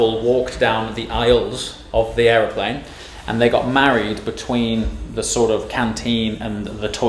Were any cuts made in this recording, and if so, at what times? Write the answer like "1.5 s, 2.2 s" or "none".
none

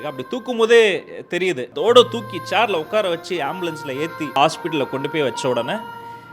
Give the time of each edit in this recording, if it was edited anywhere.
1.7 s, 4.4 s

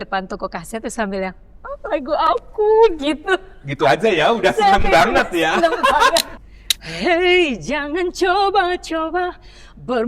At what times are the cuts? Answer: 6.3 s

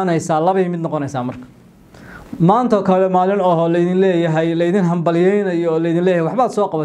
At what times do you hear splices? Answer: none

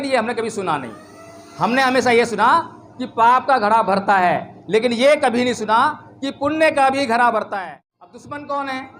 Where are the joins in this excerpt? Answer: 7.5 s

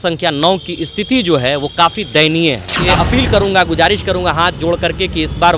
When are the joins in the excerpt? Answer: 2.9 s

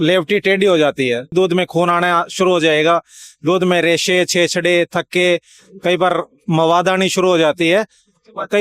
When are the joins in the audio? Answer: 1.3 s

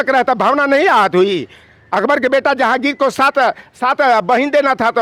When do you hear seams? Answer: none

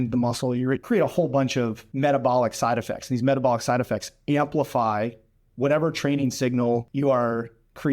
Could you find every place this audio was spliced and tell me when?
0.8 s, 1.8 s, 6.9 s

